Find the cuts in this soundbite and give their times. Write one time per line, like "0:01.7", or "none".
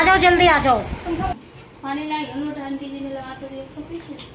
none